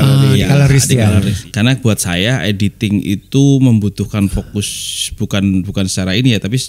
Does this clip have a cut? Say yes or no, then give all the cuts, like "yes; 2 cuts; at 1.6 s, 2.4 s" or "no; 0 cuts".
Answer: yes; 1 cut; at 1.4 s